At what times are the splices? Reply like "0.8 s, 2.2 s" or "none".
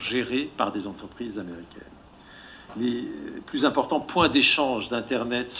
none